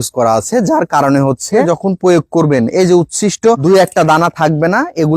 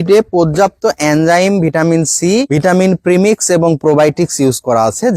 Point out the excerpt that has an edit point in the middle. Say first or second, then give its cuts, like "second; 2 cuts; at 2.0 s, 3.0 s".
first; 2 cuts; at 1.6 s, 3.6 s